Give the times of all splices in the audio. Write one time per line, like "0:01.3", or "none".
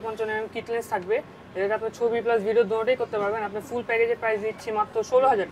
none